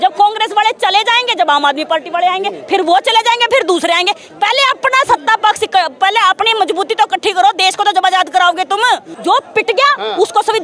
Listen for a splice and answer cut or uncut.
cut